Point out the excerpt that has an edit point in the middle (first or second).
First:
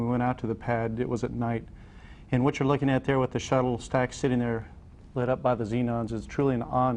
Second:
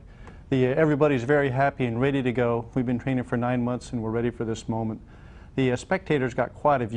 second